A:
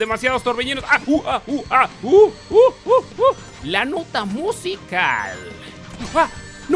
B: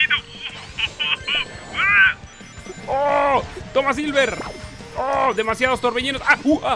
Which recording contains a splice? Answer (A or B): A